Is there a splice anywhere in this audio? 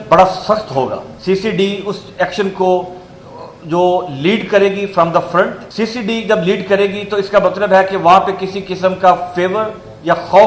yes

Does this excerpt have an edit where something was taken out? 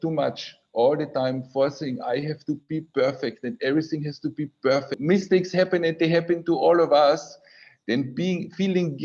yes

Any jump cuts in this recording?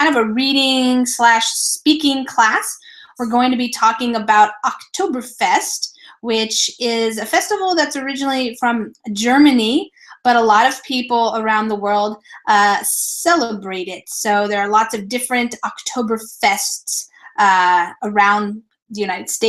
no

